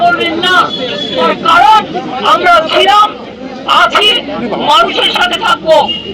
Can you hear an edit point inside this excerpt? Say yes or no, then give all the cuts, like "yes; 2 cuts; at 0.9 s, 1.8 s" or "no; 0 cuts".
no; 0 cuts